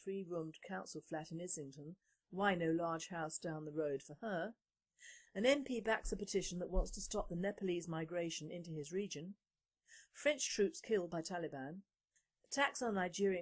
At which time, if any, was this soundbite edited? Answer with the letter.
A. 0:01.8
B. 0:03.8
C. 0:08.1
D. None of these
A